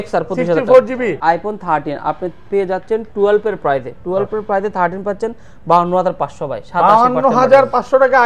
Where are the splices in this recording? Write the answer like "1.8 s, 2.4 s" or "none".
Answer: 1.2 s